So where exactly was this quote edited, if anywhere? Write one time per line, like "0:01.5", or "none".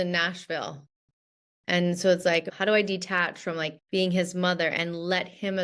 0:02.4
0:03.8